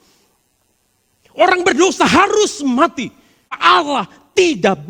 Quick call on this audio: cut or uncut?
cut